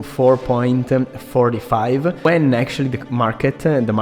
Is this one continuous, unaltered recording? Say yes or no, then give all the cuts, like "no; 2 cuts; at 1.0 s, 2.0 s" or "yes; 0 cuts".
no; 1 cut; at 2.2 s